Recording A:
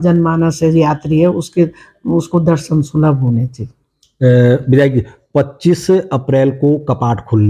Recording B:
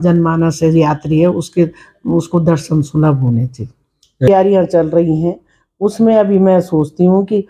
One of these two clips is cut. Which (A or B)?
B